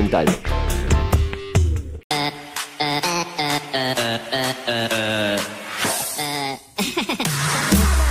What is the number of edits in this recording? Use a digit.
1